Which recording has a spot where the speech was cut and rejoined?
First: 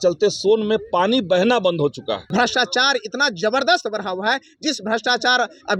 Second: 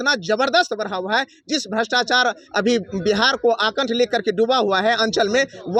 first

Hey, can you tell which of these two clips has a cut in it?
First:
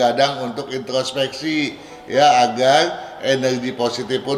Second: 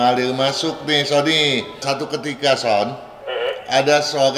second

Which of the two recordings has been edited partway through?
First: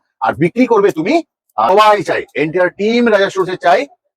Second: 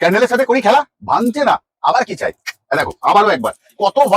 first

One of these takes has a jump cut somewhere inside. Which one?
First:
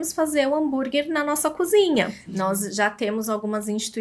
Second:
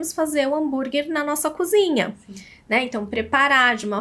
first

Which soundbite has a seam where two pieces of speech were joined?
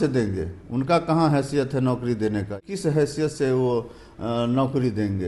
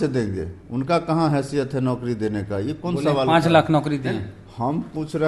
first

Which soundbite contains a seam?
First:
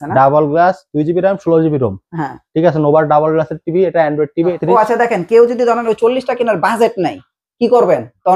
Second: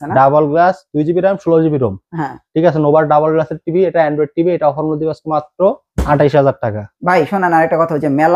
first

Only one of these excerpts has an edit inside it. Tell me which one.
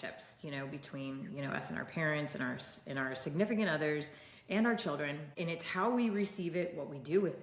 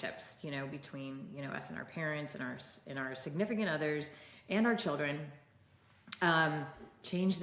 first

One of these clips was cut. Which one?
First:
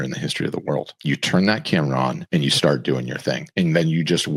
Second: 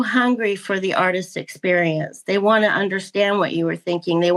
first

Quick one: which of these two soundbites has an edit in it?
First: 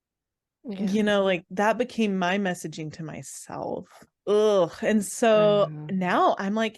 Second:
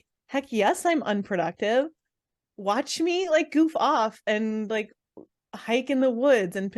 first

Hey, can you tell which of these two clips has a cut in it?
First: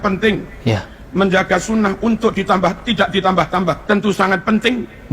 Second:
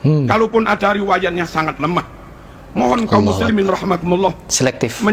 first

